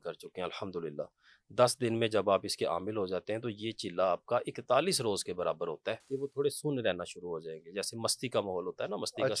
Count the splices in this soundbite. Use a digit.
1